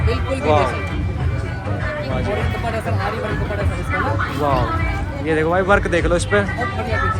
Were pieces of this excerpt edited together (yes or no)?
no